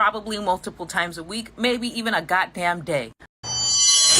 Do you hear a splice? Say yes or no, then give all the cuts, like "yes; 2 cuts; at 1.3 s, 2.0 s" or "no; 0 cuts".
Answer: yes; 1 cut; at 3.2 s